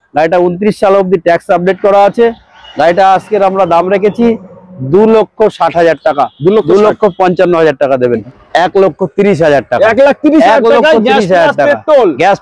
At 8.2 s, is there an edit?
yes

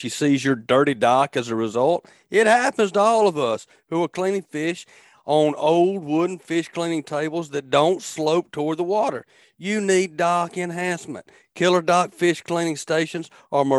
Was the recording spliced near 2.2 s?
no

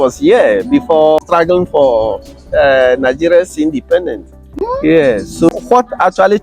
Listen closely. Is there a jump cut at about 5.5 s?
yes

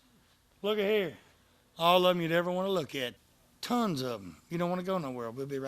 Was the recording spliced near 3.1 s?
yes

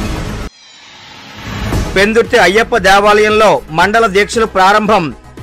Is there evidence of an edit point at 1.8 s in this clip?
yes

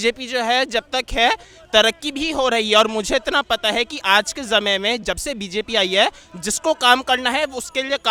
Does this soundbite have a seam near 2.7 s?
no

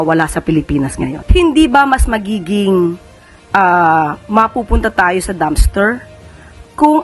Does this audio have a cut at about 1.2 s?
yes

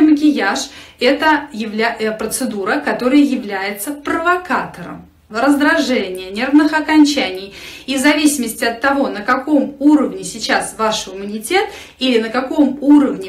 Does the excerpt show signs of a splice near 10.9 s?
no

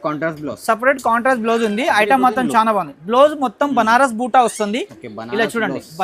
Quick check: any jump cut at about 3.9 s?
no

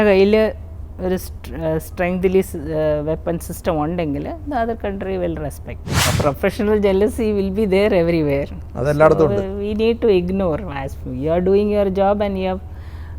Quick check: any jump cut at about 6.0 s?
yes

